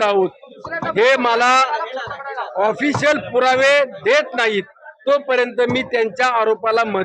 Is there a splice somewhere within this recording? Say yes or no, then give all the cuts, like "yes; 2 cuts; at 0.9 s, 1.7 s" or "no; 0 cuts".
no; 0 cuts